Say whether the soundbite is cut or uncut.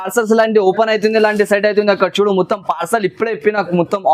uncut